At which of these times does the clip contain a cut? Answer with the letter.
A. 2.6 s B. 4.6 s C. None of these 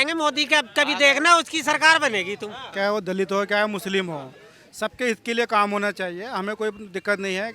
A